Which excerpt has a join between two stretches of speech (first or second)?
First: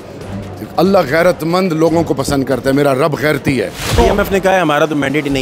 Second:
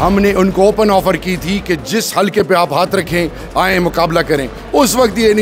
first